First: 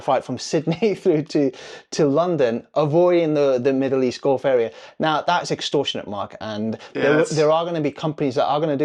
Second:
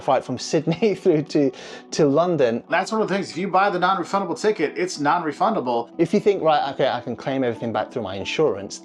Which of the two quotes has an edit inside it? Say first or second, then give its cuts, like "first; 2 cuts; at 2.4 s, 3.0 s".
second; 2 cuts; at 2.7 s, 5.9 s